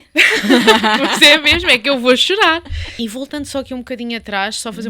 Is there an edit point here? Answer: yes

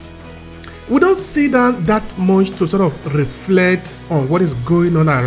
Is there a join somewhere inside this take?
no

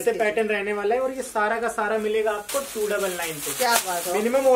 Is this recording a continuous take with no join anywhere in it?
yes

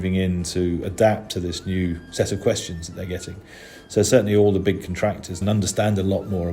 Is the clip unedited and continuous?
no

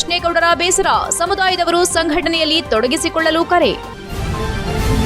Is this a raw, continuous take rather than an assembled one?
no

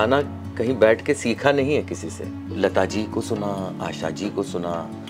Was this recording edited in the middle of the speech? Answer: yes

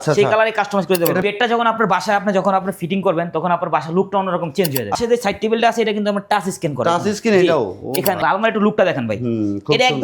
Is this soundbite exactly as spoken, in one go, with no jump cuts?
no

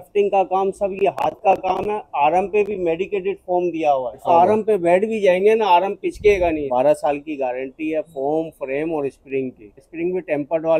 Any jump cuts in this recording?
yes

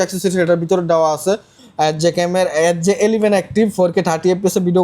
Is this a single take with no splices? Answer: no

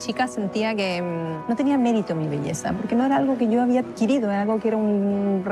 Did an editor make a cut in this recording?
yes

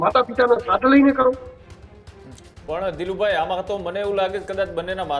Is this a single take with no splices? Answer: yes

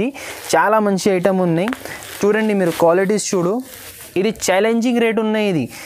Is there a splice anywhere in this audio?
no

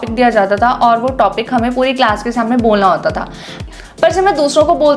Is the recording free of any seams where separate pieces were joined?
no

